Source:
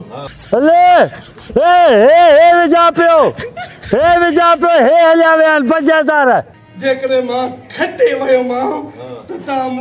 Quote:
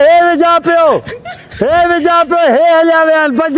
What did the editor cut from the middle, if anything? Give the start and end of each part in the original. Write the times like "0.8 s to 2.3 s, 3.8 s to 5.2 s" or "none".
none